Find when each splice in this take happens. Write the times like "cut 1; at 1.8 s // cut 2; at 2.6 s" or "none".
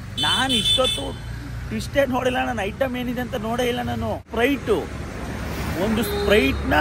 cut 1; at 4.2 s